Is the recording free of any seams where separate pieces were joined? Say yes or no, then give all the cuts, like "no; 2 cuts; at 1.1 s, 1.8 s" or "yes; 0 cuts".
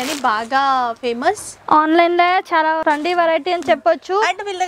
no; 1 cut; at 2.8 s